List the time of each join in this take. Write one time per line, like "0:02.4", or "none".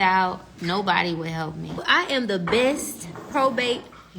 0:01.8